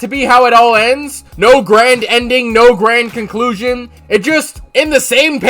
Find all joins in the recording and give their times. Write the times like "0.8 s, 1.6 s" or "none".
none